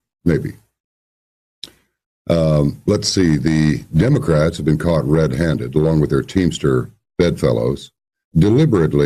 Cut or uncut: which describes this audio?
uncut